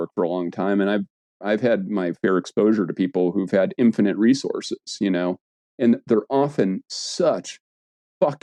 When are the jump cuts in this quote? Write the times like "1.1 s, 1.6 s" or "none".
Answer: none